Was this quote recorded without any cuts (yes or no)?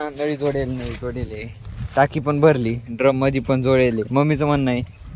yes